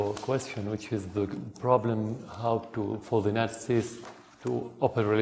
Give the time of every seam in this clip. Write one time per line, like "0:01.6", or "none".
0:01.1

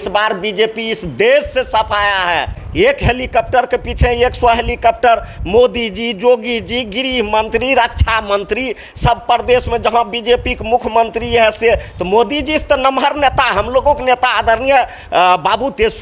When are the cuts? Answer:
0:02.6

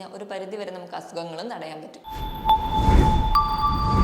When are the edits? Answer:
0:02.0

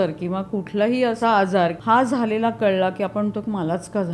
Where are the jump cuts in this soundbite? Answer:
0:01.2

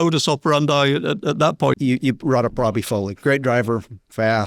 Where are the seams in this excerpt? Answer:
0:01.7

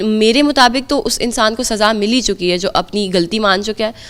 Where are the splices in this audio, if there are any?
none

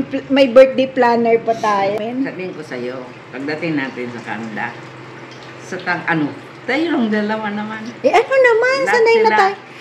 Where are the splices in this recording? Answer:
0:02.0

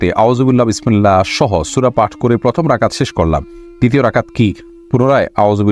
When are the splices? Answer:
none

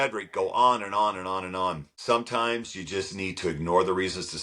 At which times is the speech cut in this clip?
0:01.9

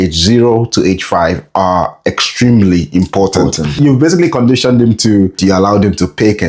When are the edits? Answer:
0:03.8
0:05.4

